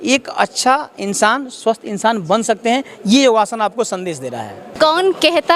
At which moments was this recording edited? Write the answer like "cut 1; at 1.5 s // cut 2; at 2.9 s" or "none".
cut 1; at 4.6 s